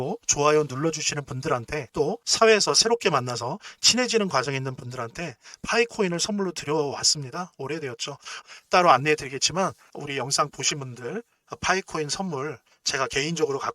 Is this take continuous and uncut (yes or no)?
no